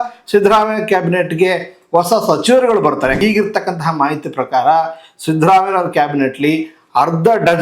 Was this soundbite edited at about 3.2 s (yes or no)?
yes